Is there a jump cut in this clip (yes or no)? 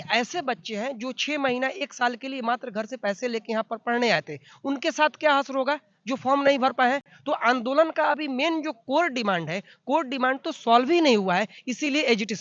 no